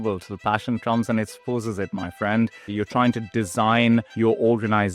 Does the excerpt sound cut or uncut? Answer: cut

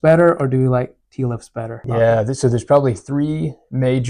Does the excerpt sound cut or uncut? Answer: cut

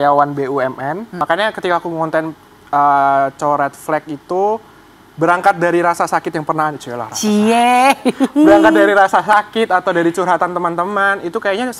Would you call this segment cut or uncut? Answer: cut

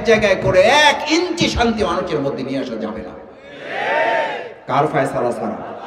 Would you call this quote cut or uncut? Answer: uncut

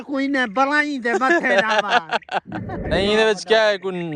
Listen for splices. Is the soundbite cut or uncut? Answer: cut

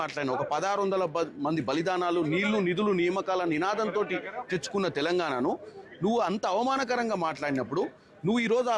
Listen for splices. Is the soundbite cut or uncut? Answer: uncut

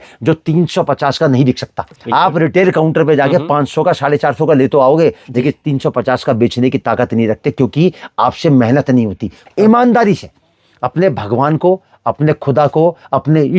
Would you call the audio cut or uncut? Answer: cut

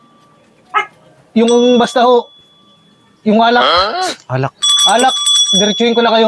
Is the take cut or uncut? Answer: uncut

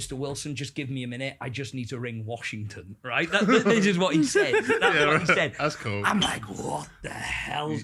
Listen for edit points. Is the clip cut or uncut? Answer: uncut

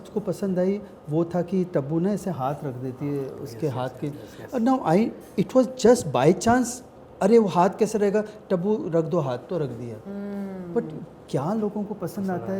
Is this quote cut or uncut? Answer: uncut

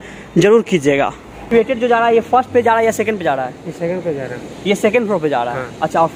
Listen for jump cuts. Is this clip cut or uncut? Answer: cut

